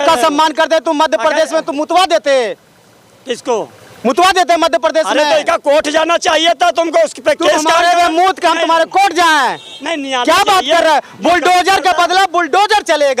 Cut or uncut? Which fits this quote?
uncut